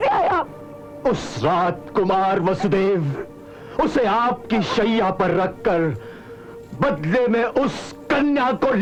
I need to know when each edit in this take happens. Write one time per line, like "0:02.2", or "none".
none